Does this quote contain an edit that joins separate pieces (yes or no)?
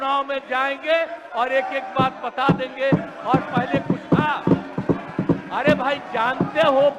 no